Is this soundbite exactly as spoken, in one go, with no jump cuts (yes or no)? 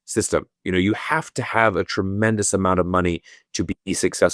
yes